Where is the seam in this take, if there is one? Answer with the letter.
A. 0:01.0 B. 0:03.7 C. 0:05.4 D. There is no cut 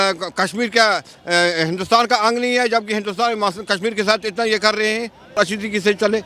C